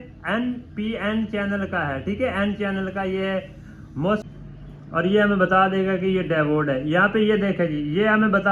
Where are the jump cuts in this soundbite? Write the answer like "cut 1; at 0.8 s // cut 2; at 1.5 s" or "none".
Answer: cut 1; at 4.2 s